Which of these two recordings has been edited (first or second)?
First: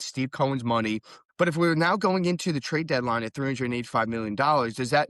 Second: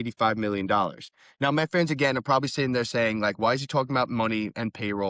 first